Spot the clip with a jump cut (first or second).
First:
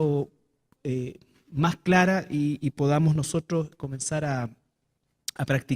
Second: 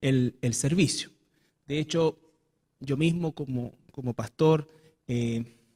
first